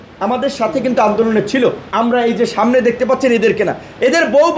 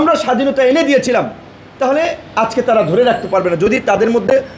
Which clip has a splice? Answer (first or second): first